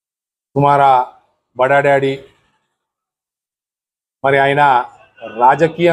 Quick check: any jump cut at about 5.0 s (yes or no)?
no